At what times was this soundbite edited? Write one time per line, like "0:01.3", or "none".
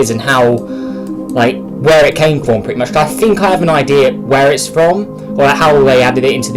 0:05.6